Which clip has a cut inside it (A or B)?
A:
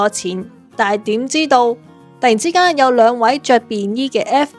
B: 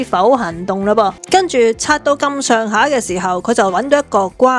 B